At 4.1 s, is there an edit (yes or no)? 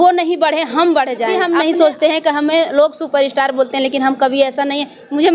no